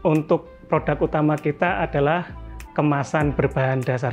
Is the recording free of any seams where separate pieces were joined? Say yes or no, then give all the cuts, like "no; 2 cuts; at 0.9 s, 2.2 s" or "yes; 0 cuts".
yes; 0 cuts